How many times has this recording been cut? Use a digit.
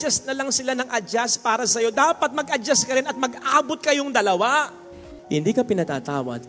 1